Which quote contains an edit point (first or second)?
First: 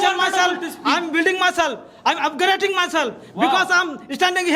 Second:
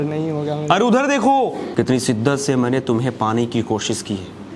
second